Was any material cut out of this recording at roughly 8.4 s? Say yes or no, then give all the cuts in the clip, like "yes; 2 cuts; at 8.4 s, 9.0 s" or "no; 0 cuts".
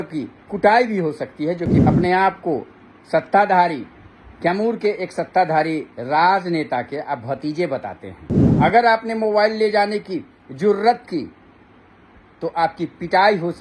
yes; 2 cuts; at 1.8 s, 8.4 s